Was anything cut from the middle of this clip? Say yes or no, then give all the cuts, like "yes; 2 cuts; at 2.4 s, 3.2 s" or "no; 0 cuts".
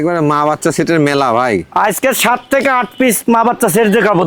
no; 0 cuts